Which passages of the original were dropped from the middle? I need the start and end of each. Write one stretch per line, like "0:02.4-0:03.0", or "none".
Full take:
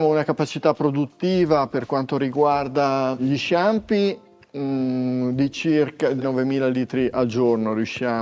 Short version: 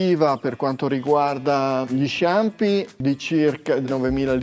0:04.3-0:05.3